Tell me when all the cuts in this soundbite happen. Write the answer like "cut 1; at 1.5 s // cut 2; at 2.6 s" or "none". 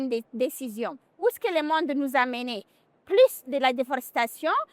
cut 1; at 1.0 s